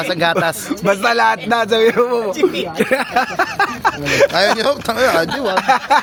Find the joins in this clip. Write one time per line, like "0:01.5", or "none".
none